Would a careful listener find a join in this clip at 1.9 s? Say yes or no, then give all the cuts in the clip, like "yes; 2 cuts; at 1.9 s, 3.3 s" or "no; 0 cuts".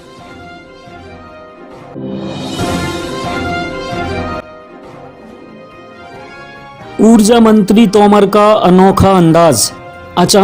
yes; 2 cuts; at 1.9 s, 4.2 s